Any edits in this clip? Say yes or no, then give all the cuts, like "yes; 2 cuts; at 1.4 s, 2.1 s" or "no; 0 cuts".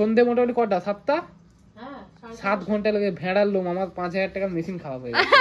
no; 0 cuts